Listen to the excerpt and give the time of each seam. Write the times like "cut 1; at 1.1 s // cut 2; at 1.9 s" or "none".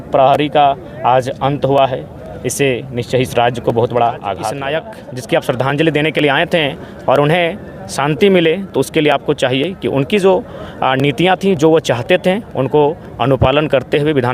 cut 1; at 4.6 s